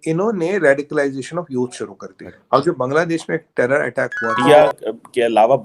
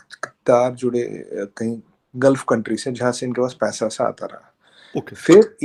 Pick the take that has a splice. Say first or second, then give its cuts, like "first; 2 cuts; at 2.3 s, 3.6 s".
first; 1 cut; at 4.4 s